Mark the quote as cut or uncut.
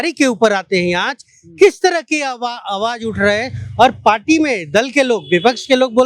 uncut